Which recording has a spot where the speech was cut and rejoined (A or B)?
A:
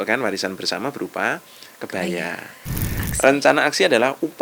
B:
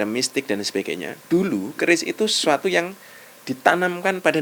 A